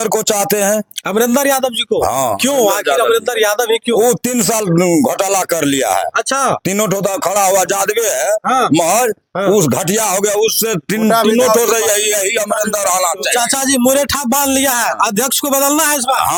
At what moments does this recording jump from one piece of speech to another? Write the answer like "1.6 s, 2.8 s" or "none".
none